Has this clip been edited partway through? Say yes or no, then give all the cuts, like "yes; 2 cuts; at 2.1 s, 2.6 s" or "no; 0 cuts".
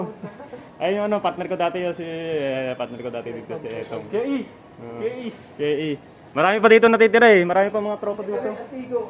no; 0 cuts